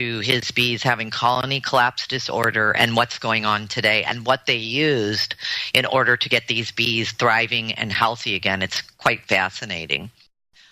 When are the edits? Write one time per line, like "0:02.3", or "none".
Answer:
0:08.3

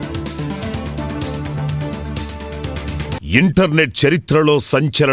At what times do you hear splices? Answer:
0:03.2

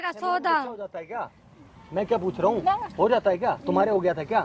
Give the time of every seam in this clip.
none

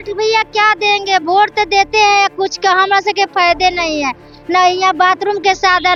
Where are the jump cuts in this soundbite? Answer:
none

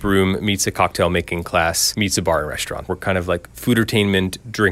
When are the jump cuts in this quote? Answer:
0:01.8
0:02.9

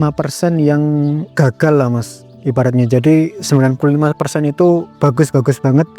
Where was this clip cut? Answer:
0:01.3
0:04.9

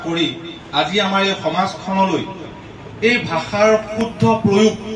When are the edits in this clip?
none

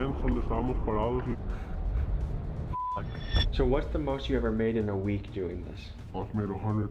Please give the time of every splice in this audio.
0:01.3
0:03.4

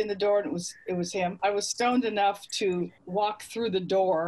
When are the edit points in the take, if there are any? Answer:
0:01.3

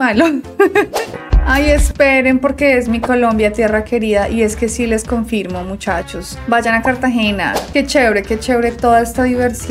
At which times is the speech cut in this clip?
0:01.1
0:07.6

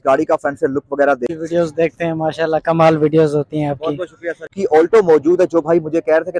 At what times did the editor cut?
0:01.4
0:04.6

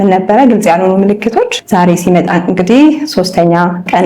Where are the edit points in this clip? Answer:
0:01.6

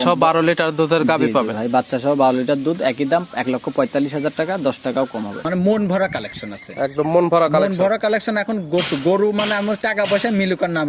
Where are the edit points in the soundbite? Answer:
0:05.5

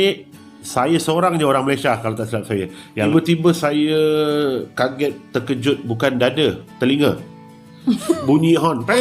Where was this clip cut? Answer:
0:03.1

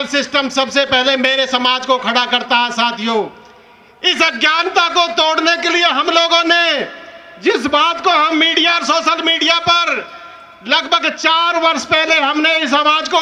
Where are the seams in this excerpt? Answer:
none

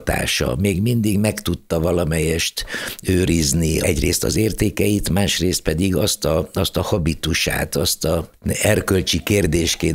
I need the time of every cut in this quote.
0:03.8
0:08.3

